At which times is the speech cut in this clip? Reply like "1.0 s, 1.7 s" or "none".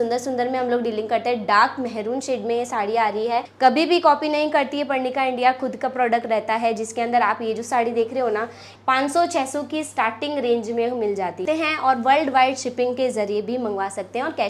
3.5 s, 8.7 s, 11.4 s